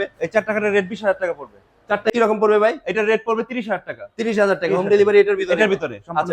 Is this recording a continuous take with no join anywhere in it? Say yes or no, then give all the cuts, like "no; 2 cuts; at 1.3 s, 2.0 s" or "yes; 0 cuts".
no; 1 cut; at 2.1 s